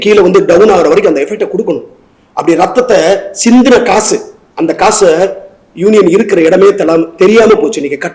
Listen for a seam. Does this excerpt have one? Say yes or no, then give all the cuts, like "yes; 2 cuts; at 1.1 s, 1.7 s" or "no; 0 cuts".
no; 0 cuts